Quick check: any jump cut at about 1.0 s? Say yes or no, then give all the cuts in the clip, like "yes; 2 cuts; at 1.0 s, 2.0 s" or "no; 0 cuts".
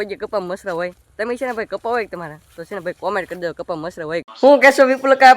no; 1 cut; at 4.3 s